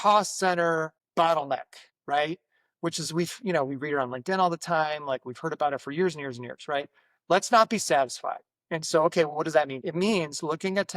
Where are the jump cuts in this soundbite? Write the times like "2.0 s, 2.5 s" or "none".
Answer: 9.8 s